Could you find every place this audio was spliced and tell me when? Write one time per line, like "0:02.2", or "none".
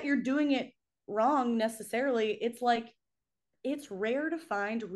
none